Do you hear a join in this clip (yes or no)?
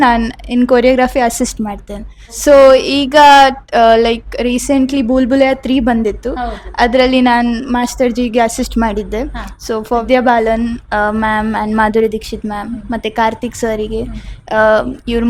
no